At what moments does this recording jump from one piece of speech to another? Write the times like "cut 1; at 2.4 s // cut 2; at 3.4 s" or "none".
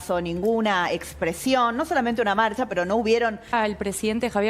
cut 1; at 3.5 s